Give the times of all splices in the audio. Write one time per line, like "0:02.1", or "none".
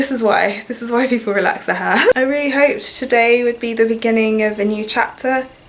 0:02.1

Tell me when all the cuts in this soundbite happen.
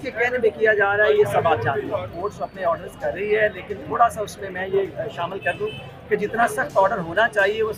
0:02.2

